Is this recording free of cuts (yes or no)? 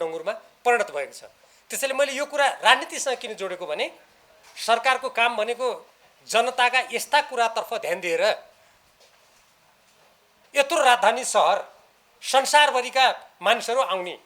yes